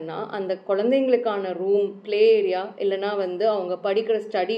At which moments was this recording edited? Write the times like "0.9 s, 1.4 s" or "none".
none